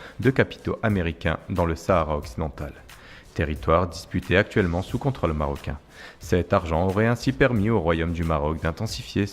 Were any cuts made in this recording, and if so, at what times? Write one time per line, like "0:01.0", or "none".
0:05.3